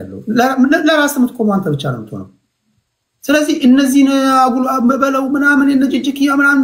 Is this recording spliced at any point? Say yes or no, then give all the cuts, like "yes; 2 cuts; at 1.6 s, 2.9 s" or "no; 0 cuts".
no; 0 cuts